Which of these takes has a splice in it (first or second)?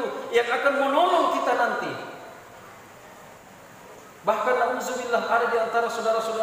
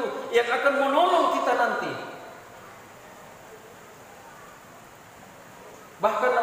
first